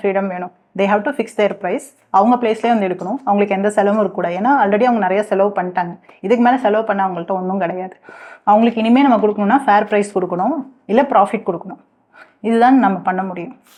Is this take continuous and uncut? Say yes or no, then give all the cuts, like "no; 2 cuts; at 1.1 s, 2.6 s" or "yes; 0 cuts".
yes; 0 cuts